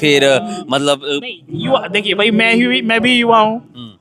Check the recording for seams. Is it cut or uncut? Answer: uncut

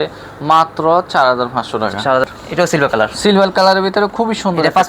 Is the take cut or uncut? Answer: cut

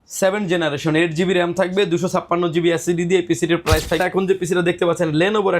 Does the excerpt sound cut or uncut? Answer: cut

